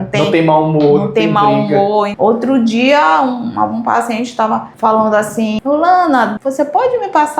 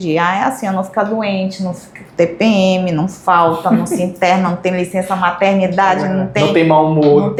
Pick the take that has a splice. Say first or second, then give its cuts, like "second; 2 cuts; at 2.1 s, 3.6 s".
first; 3 cuts; at 2.1 s, 5.6 s, 6.4 s